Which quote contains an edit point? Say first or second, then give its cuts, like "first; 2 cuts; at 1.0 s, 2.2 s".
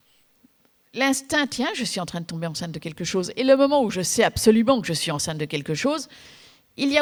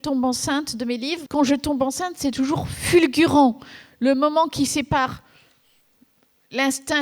second; 1 cut; at 1.2 s